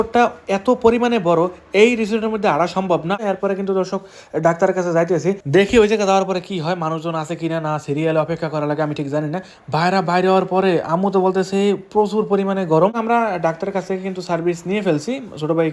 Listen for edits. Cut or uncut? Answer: cut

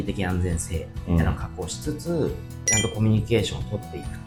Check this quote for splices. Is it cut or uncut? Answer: uncut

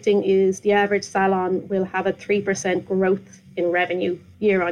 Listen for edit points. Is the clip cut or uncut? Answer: uncut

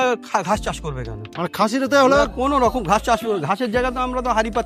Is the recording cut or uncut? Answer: uncut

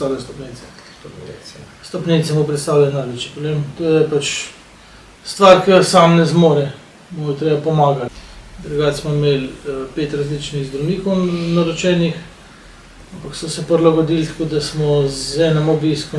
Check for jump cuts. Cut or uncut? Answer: cut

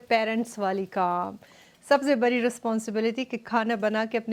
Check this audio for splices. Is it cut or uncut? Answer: uncut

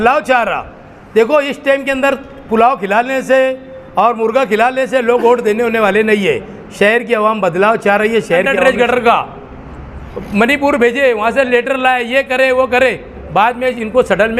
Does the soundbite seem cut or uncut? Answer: cut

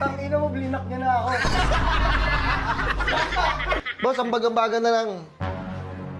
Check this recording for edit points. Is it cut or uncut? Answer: cut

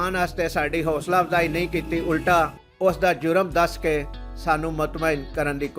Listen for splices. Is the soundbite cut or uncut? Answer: cut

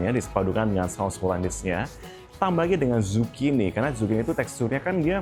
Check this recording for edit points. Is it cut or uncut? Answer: uncut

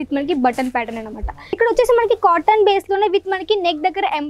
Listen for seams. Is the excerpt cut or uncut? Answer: cut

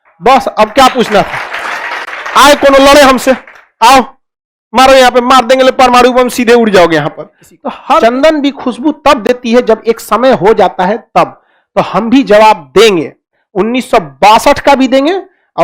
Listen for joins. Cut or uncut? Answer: cut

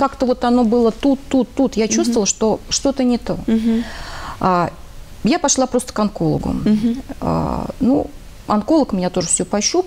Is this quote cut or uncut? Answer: uncut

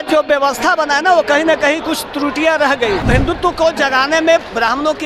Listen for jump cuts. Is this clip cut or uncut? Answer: cut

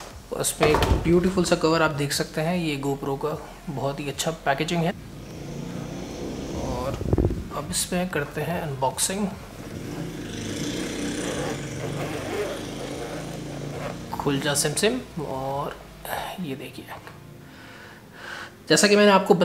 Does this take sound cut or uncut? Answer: cut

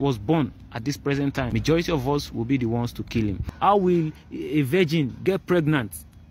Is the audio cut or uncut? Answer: cut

